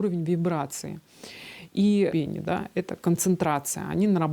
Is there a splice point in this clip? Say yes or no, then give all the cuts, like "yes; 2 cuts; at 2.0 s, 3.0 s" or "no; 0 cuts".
yes; 1 cut; at 2.1 s